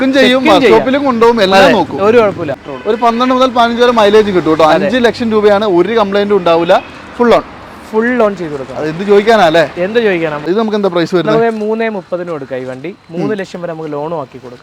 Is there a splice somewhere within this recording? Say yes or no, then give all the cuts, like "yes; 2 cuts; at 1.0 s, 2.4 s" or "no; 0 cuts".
yes; 2 cuts; at 2.5 s, 10.4 s